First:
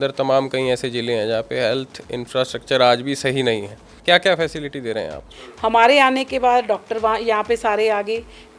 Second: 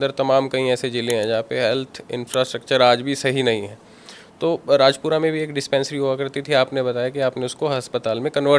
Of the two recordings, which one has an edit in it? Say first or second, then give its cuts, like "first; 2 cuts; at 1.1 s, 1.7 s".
first; 2 cuts; at 3.9 s, 5.2 s